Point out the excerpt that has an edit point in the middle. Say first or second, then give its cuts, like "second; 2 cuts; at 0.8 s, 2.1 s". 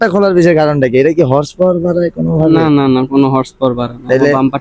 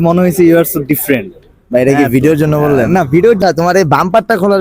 second; 1 cut; at 3.4 s